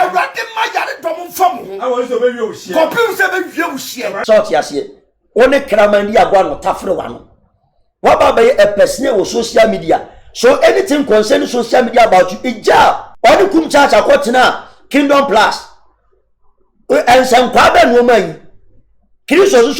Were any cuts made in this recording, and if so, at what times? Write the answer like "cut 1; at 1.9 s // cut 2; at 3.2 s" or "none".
cut 1; at 4.2 s // cut 2; at 13.1 s